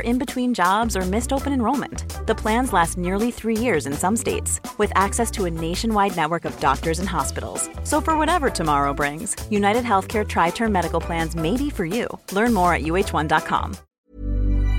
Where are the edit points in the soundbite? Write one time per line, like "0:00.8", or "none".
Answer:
0:13.8

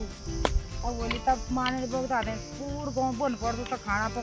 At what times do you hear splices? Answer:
none

